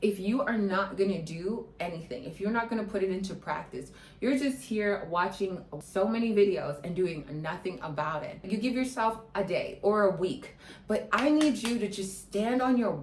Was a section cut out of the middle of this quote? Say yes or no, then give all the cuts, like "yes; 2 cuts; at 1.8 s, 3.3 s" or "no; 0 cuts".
yes; 1 cut; at 8.5 s